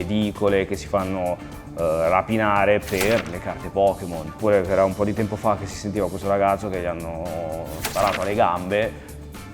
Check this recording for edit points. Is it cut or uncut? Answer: uncut